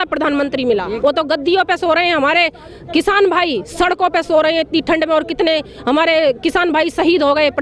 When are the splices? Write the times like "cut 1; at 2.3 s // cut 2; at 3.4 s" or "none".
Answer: cut 1; at 0.9 s